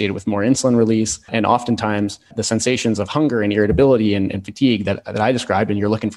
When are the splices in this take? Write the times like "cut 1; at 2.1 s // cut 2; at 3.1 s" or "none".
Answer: cut 1; at 1.2 s // cut 2; at 2.3 s